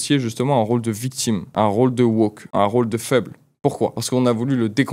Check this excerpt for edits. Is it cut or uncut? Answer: cut